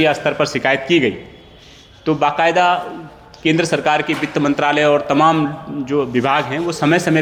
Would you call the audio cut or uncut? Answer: uncut